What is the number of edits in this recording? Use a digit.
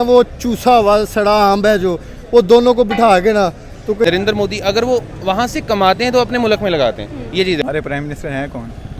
2